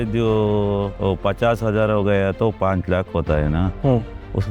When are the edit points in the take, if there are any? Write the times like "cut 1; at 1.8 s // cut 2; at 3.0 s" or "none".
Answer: cut 1; at 0.9 s